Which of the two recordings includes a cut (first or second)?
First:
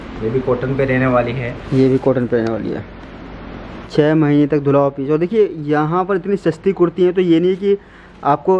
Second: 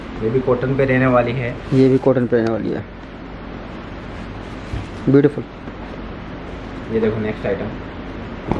first